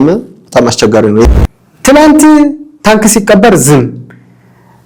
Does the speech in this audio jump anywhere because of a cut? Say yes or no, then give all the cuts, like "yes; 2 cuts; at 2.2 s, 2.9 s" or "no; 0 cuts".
yes; 1 cut; at 1.2 s